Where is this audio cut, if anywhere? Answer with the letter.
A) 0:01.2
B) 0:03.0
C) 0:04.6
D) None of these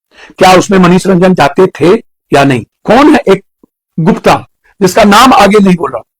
D